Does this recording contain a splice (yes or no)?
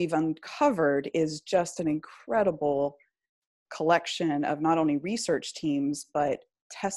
no